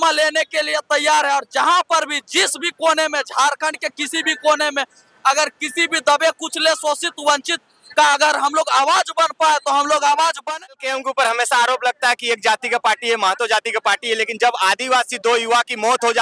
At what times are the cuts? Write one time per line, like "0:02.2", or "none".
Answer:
0:10.6